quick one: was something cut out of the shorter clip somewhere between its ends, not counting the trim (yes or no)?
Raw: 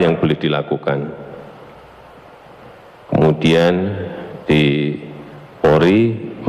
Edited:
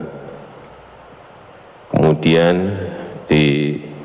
yes